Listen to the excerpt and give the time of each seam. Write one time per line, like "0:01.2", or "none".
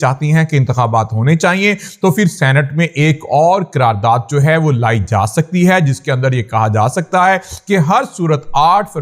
none